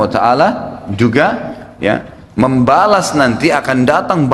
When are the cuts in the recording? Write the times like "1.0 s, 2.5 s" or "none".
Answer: none